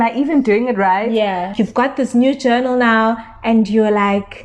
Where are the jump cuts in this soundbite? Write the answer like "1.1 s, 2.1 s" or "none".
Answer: 1.5 s

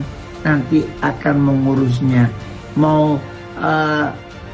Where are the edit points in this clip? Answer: none

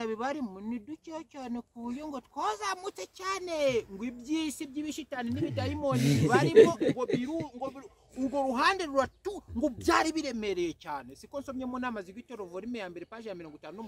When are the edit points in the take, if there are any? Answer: none

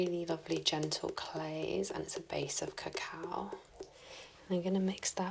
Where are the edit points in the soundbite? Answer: 3.9 s

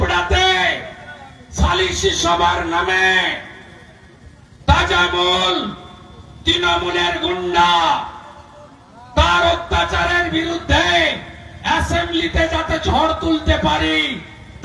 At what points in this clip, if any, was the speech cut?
none

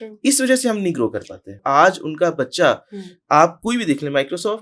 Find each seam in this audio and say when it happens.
1.6 s

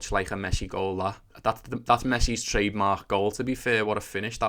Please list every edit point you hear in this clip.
1.3 s

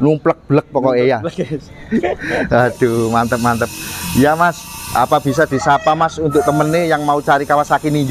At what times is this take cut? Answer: none

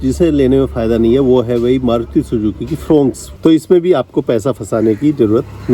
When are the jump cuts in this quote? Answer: 3.2 s

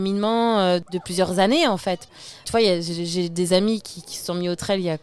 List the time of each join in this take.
0.8 s, 2.4 s

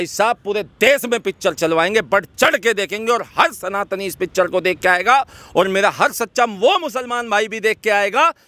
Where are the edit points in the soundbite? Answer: none

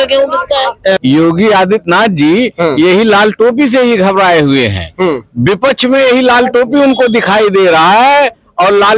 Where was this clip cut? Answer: 1.0 s

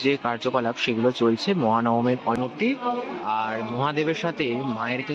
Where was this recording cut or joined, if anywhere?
2.4 s

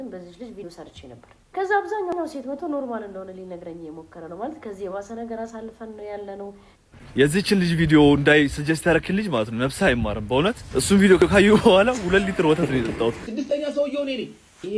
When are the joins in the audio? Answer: none

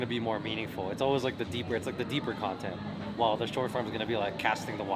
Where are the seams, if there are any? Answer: none

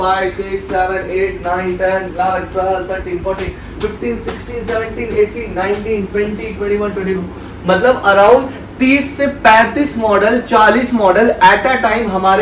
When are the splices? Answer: none

